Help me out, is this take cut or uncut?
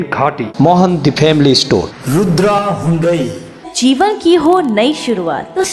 cut